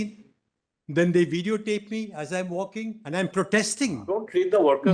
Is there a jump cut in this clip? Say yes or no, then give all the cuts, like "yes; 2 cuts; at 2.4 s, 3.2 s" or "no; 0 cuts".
yes; 2 cuts; at 3.0 s, 4.1 s